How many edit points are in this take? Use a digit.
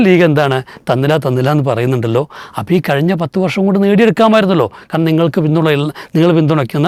0